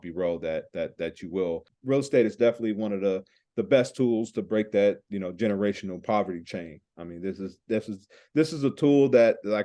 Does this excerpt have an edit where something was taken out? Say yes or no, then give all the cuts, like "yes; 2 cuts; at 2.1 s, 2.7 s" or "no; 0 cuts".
yes; 1 cut; at 1.7 s